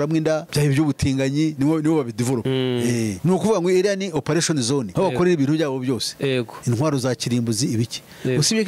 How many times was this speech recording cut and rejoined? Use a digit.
0